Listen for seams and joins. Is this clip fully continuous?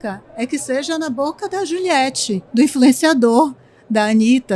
yes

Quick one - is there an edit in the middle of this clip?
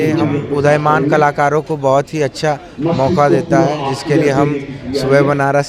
no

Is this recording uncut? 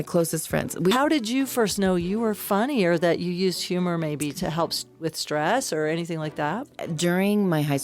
no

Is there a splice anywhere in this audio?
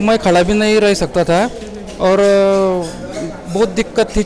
no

